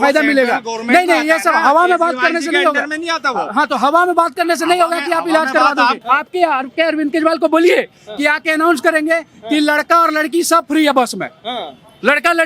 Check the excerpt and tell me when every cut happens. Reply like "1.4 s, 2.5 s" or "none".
6.0 s